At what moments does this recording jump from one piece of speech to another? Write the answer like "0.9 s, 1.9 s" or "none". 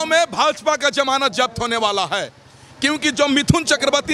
none